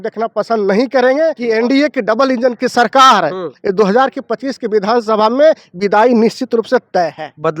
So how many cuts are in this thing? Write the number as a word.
one